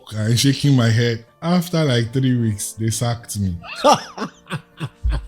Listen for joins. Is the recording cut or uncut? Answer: cut